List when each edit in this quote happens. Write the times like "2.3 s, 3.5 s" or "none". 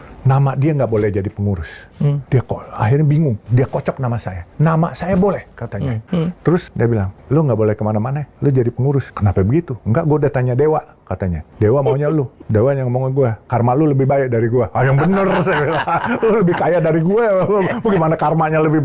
2.2 s, 3.4 s, 4.4 s, 6.0 s, 6.8 s, 8.2 s, 9.1 s, 11.4 s, 12.4 s